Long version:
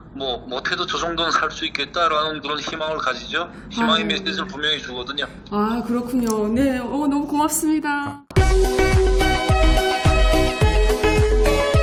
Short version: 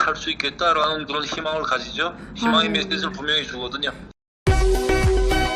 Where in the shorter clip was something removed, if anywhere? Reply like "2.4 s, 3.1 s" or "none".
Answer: 4.3 s